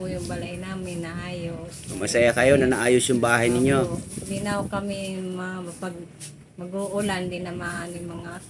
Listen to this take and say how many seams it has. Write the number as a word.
zero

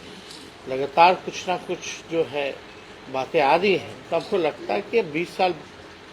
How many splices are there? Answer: one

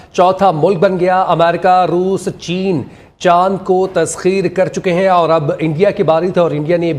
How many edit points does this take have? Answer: zero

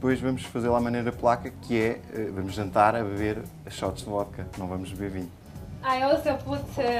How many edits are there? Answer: zero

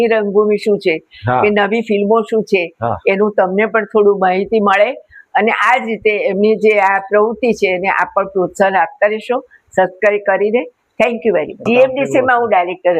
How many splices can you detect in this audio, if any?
one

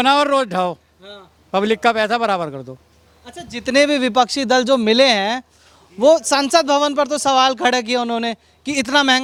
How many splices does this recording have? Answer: zero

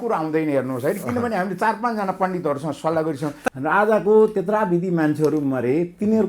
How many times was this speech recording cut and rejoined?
one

